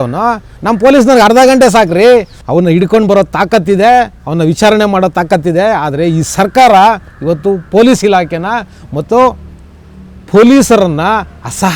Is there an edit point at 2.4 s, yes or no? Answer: yes